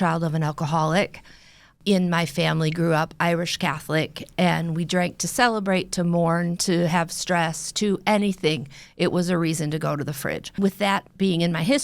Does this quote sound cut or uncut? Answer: cut